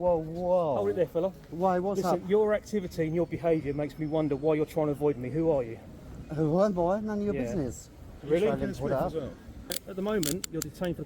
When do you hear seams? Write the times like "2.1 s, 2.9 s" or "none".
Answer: 9.8 s